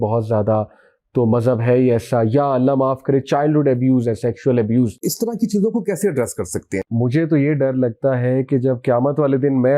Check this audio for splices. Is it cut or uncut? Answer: cut